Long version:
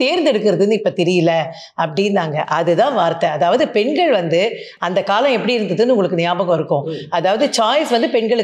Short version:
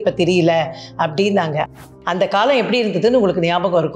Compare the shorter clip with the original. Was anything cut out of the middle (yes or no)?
yes